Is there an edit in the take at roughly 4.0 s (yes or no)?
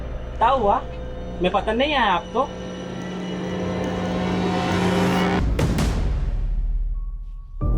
no